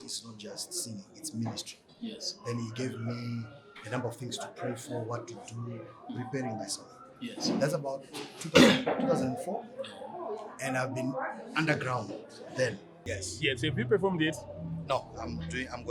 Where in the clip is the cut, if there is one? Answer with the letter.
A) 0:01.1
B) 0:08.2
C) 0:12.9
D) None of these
C